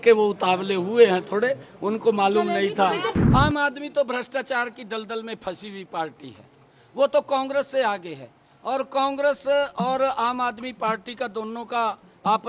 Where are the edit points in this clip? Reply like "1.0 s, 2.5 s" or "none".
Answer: 3.1 s